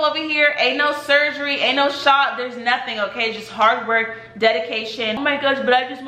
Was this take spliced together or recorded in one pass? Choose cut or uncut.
cut